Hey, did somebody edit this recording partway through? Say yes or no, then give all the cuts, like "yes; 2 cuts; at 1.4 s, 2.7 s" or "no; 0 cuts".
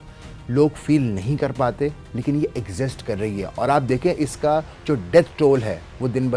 no; 0 cuts